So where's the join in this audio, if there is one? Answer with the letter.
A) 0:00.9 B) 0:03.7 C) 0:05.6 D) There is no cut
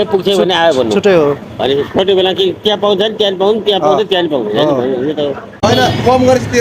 C